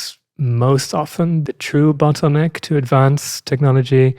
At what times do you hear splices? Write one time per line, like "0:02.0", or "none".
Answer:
0:01.4